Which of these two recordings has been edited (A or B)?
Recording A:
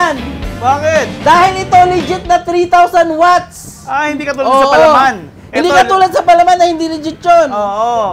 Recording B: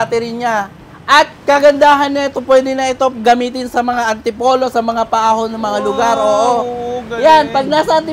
A